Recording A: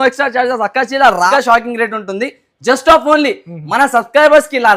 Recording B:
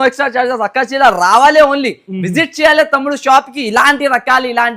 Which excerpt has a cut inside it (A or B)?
A